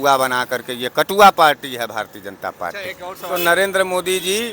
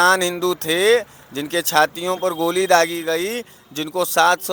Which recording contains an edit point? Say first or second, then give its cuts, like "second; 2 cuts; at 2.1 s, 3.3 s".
first; 1 cut; at 3.3 s